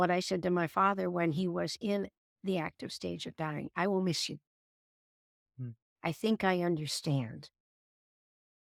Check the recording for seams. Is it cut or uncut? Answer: uncut